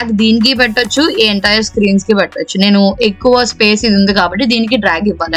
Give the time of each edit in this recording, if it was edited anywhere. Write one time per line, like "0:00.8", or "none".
none